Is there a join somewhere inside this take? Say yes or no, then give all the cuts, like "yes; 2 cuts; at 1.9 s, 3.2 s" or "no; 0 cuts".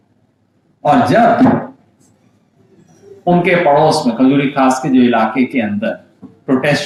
no; 0 cuts